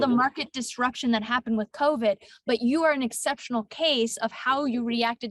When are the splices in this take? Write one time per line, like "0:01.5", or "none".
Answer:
none